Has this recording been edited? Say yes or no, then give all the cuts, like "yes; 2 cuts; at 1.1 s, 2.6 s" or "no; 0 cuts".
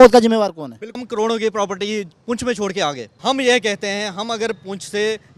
yes; 2 cuts; at 1.0 s, 3.1 s